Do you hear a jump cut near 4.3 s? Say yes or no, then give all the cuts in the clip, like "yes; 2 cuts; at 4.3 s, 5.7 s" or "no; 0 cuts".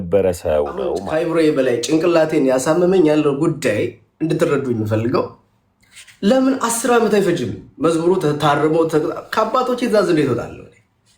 no; 1 cut; at 1.0 s